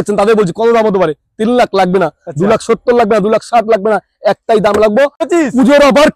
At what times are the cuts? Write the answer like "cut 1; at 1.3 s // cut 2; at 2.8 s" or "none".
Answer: cut 1; at 5.2 s

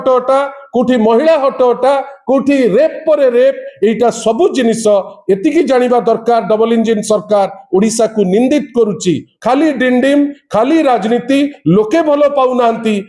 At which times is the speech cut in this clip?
cut 1; at 9.3 s

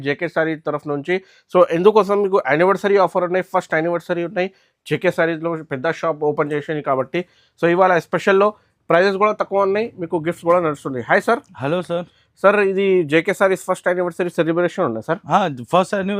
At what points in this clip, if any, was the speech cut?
none

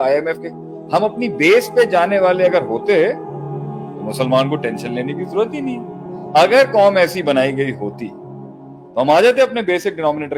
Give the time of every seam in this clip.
none

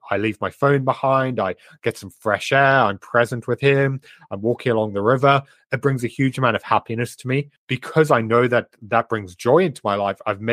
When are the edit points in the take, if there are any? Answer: cut 1; at 7.6 s

